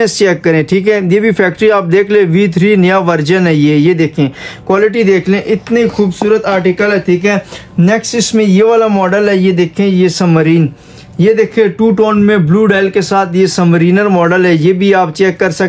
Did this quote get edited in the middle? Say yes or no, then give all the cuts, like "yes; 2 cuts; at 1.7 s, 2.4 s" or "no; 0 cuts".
no; 0 cuts